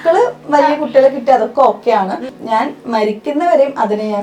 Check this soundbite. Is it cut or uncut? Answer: cut